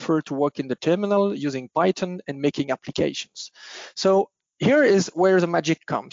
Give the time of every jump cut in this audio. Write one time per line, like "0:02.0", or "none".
none